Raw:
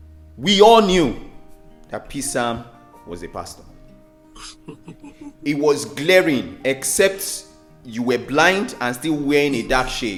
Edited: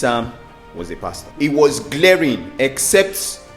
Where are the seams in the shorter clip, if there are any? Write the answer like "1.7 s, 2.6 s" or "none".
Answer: 1.2 s